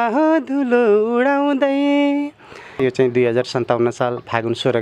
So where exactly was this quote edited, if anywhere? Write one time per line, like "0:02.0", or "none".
0:02.8